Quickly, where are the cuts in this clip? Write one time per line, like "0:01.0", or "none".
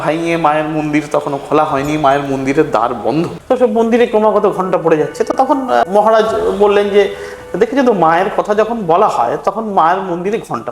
0:03.4
0:05.8